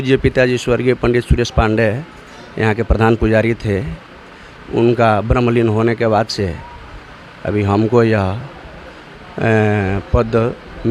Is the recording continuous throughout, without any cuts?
yes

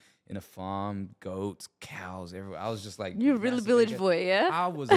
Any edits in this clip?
no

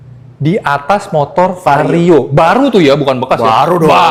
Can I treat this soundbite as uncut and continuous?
yes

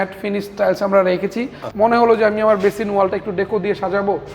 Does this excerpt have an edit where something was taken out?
yes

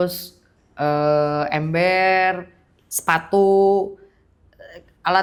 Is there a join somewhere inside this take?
no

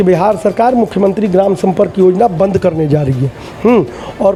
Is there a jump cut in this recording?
no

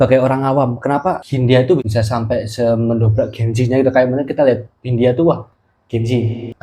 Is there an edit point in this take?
yes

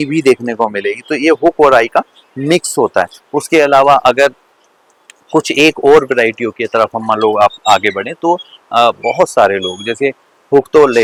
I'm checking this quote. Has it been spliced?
no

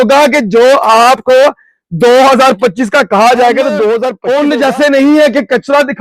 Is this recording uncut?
no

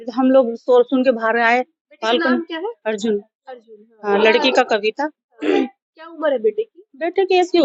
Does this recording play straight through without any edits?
yes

